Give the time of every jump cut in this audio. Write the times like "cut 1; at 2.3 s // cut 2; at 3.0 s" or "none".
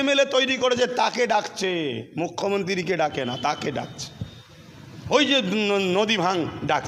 none